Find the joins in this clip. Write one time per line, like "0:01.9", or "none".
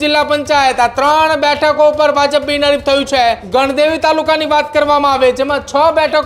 0:03.4